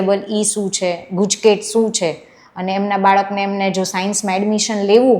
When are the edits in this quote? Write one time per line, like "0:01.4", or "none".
none